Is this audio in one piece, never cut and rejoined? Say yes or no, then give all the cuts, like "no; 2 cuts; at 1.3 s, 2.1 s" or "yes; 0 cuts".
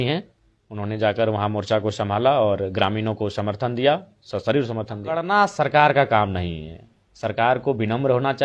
no; 1 cut; at 5.2 s